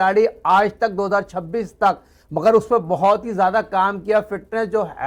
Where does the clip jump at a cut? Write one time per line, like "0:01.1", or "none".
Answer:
none